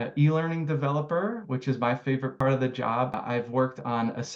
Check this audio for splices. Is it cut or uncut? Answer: cut